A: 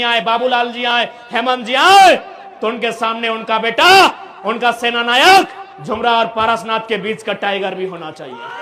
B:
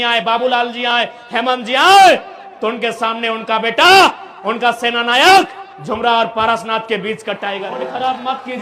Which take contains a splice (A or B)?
B